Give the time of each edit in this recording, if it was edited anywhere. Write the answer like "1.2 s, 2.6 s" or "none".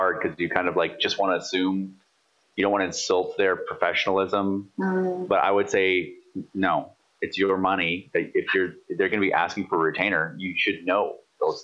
none

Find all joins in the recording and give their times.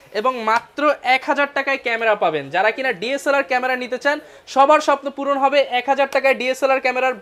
none

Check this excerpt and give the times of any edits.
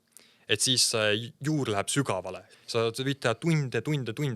2.4 s

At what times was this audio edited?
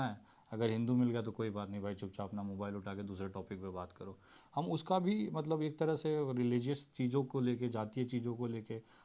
none

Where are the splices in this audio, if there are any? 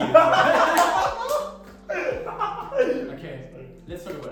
none

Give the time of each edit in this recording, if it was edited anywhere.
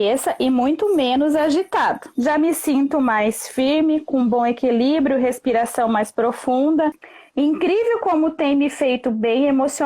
2.1 s, 7.1 s

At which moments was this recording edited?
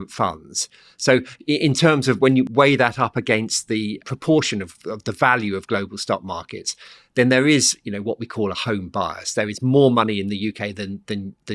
2.5 s, 4.0 s

